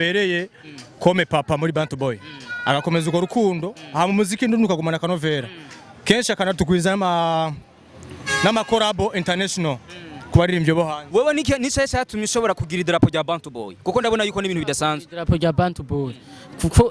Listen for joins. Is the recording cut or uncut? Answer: uncut